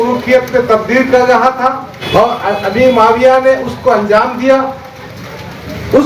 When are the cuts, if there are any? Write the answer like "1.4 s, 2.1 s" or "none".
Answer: 1.9 s